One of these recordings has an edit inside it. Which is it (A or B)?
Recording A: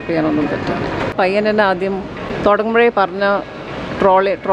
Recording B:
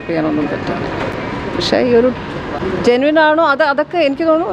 A